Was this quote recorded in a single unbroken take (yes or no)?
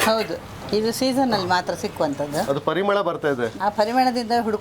no